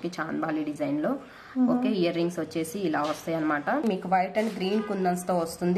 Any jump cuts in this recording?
yes; 1 cut; at 3.8 s

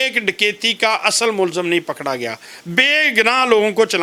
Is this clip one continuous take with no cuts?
yes; 0 cuts

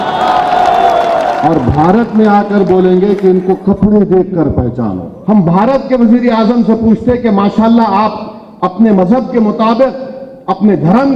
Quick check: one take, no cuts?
no; 1 cut; at 5.1 s

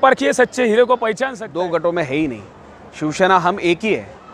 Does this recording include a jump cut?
yes; 1 cut; at 1.4 s

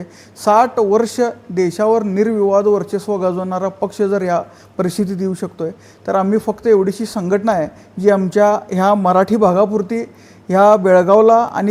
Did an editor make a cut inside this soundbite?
no; 0 cuts

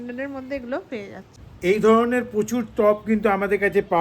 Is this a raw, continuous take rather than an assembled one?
no; 1 cut; at 1.5 s

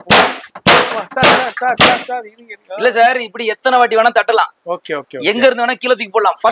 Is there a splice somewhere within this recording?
no; 0 cuts

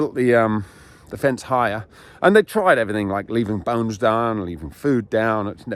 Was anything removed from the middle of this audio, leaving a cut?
no; 0 cuts

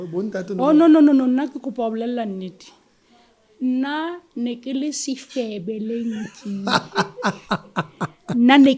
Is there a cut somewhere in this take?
no; 0 cuts

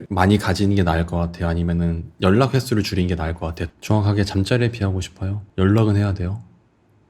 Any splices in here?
yes; 1 cut; at 3.6 s

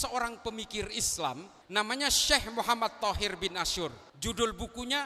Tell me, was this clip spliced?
yes; 2 cuts; at 1.5 s, 4.1 s

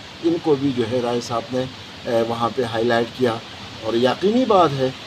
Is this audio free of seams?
yes; 0 cuts

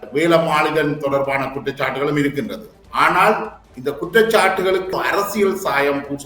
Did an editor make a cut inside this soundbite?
yes; 1 cut; at 4.9 s

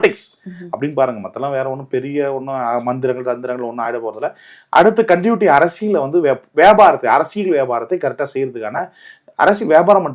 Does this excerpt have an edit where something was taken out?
no; 0 cuts

